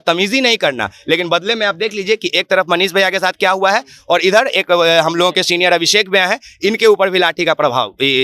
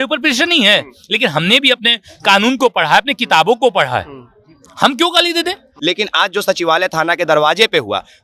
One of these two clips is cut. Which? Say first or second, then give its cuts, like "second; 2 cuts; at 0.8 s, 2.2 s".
second; 1 cut; at 5.7 s